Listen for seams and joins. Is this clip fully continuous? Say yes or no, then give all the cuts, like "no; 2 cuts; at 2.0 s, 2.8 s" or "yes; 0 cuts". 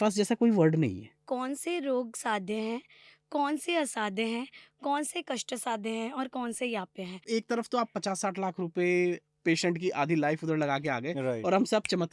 no; 2 cuts; at 1.2 s, 7.2 s